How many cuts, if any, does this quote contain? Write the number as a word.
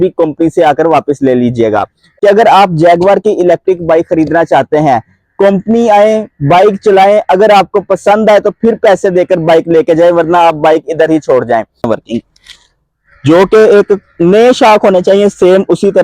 two